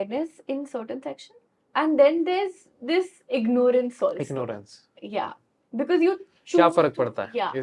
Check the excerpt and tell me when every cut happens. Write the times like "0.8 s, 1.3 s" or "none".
none